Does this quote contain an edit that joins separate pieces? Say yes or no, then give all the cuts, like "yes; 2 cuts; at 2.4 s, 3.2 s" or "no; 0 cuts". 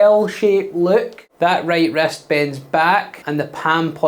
yes; 2 cuts; at 1.2 s, 3.2 s